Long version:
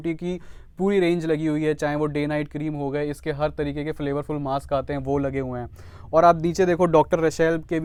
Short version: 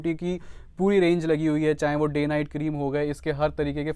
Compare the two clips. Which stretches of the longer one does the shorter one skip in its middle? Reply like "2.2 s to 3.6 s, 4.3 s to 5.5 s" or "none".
none